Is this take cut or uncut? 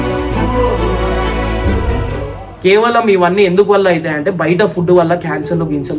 uncut